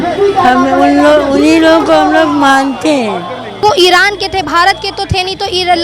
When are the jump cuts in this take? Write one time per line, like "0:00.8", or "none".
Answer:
0:03.6